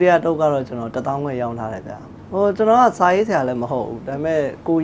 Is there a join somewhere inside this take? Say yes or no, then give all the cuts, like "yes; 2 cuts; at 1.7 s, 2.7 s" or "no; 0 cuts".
no; 0 cuts